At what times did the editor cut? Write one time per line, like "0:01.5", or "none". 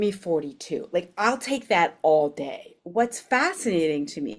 0:02.7